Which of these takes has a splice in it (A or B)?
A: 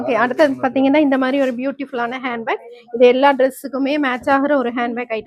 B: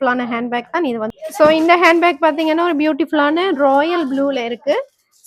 B